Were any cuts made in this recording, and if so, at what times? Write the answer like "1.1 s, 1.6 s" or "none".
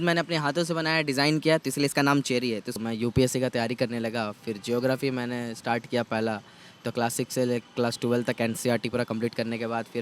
2.8 s